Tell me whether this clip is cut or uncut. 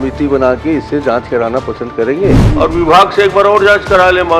cut